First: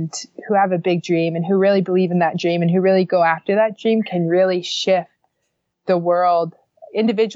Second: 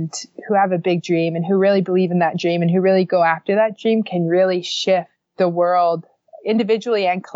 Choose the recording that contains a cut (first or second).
second